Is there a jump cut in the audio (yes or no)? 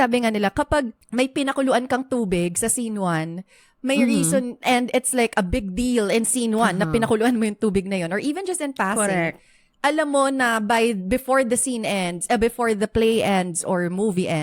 yes